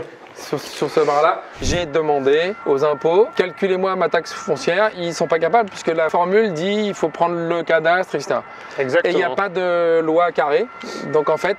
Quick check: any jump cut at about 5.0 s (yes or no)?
yes